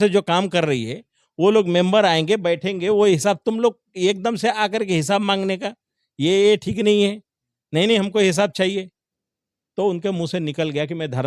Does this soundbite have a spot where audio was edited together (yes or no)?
no